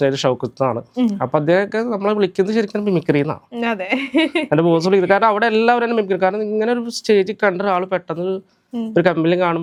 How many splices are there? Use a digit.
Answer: 0